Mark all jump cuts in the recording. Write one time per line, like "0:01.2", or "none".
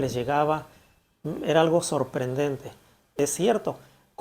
0:03.2